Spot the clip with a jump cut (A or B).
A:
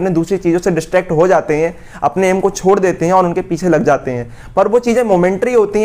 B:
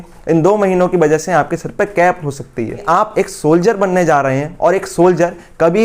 B